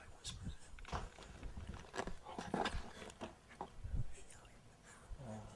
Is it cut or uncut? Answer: cut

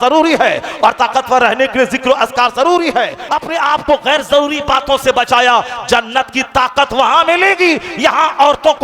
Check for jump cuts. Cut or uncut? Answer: cut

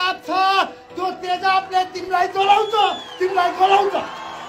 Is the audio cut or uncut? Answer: uncut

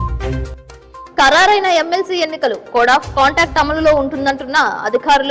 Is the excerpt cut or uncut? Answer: cut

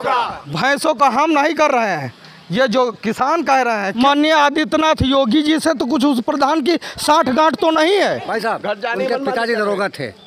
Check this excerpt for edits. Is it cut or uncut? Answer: cut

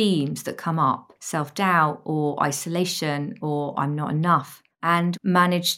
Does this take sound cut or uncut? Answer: cut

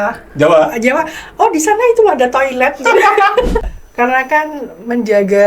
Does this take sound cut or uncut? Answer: cut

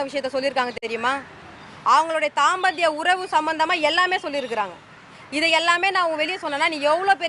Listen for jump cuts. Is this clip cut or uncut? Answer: uncut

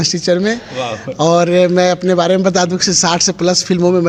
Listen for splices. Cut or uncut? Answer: uncut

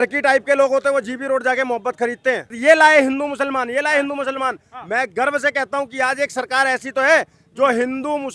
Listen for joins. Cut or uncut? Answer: cut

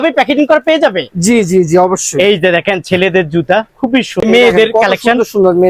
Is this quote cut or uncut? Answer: cut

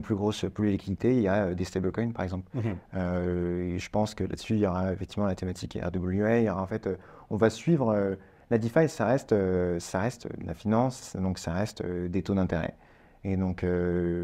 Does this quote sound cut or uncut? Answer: uncut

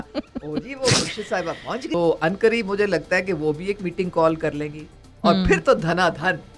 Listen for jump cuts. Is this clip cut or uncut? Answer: cut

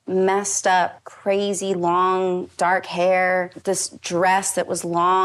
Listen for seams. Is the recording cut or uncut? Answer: cut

